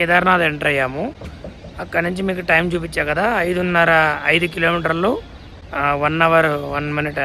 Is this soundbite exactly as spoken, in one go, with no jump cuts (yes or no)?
yes